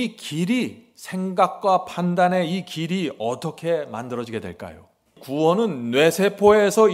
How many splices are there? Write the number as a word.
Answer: one